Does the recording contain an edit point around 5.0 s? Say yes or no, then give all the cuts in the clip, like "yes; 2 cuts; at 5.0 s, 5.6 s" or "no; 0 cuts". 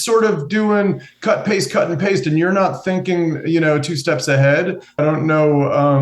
yes; 1 cut; at 5.0 s